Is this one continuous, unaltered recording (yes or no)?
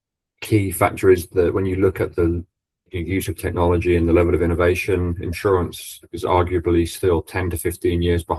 yes